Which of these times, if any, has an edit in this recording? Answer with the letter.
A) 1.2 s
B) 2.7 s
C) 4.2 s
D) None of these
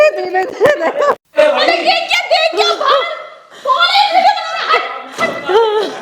A